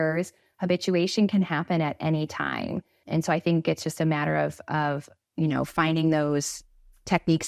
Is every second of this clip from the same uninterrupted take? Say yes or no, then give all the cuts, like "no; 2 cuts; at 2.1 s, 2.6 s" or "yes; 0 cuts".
yes; 0 cuts